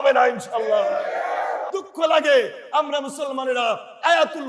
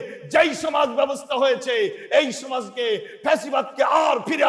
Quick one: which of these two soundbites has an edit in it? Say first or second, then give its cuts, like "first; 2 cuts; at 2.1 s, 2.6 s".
first; 1 cut; at 1.7 s